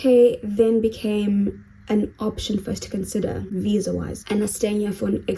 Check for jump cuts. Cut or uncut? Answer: uncut